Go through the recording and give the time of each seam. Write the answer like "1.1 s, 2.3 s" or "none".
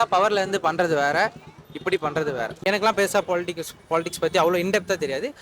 2.6 s

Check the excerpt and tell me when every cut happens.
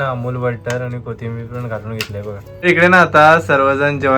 2.6 s

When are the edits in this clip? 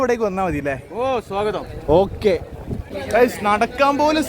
2.9 s

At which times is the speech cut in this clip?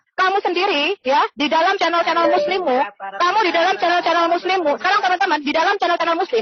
none

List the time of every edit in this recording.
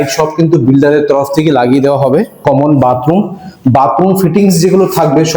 2.3 s

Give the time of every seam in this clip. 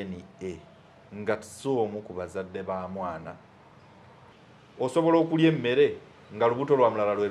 4.3 s

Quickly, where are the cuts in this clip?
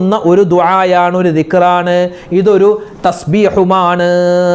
none

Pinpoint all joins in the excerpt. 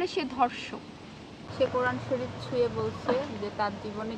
1.4 s

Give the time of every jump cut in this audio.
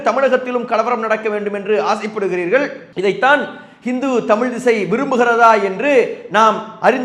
none

